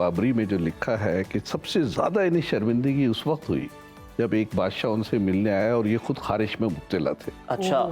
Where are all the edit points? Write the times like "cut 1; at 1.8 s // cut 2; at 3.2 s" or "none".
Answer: none